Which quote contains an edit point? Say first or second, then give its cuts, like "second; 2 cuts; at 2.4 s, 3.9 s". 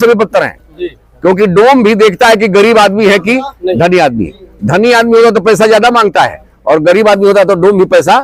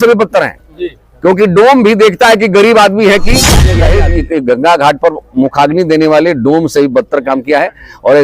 second; 1 cut; at 3.7 s